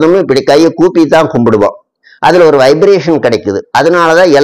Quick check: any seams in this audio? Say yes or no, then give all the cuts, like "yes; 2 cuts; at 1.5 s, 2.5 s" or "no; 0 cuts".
no; 0 cuts